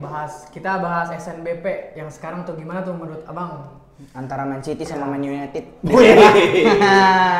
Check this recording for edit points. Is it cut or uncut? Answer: uncut